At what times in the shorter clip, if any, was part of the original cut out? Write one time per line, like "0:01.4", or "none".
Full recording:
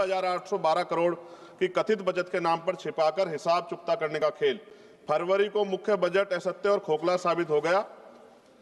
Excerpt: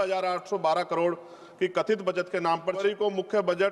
0:02.8